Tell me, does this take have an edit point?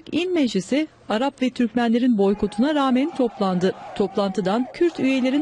no; 0 cuts

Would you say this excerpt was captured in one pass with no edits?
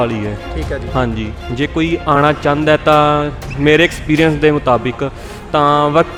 yes; 0 cuts

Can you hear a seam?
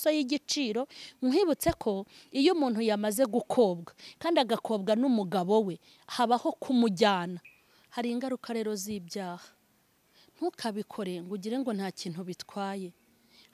yes; 1 cut; at 7.6 s

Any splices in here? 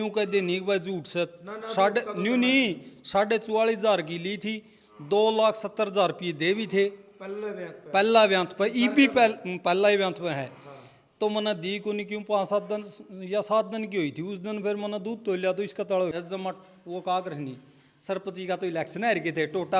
yes; 1 cut; at 16.1 s

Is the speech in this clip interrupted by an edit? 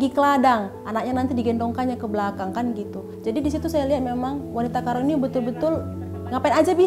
yes; 1 cut; at 3.1 s

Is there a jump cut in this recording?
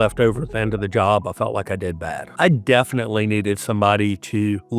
yes; 1 cut; at 2.2 s

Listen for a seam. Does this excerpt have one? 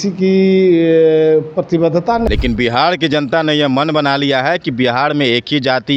yes; 1 cut; at 2.3 s

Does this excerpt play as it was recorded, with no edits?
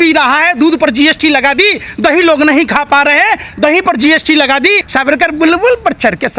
no; 1 cut; at 4.9 s

